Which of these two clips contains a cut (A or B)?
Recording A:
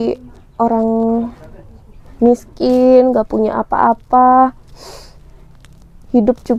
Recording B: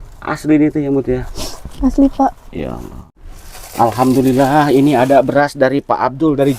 B